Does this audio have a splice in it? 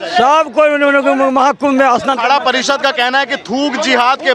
no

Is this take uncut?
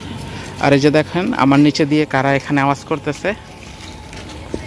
yes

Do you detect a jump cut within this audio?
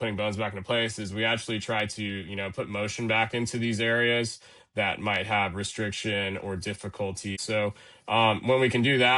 yes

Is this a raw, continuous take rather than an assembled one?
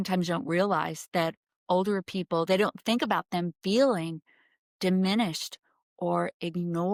yes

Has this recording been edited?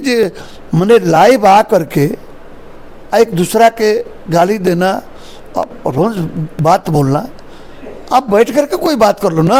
no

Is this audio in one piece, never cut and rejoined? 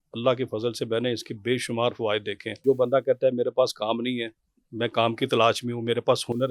no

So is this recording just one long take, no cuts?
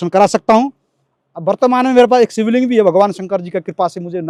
yes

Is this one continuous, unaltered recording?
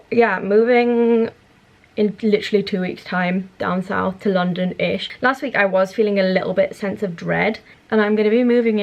no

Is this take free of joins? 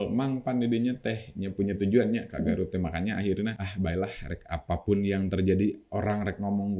no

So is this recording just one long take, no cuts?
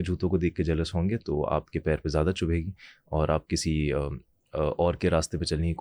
yes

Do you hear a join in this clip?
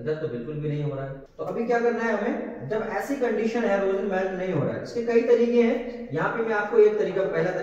yes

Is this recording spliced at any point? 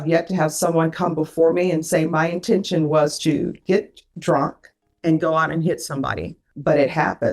yes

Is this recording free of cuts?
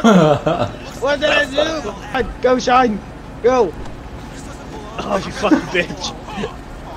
no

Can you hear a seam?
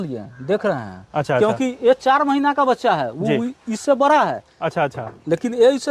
no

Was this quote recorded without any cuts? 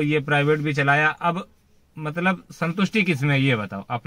yes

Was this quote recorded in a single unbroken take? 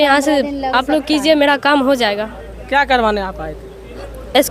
yes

